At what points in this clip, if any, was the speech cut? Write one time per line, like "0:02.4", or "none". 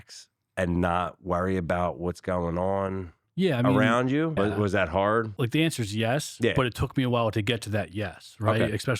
0:04.3
0:05.3